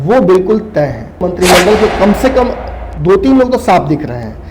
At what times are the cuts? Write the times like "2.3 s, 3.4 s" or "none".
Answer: 1.2 s